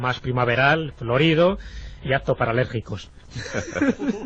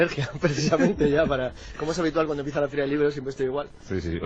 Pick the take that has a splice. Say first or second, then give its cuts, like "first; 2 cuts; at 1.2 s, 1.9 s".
first; 1 cut; at 0.9 s